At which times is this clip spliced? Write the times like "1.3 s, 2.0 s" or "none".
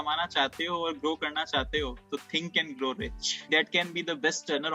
3.5 s